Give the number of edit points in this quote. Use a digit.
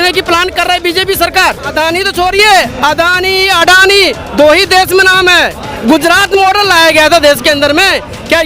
1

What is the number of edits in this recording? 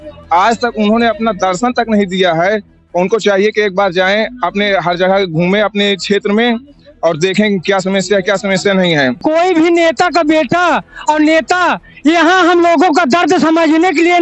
1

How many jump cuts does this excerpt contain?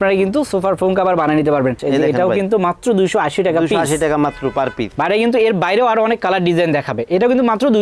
2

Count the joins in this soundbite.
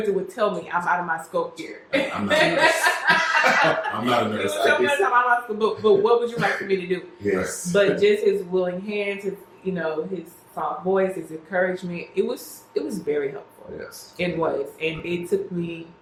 0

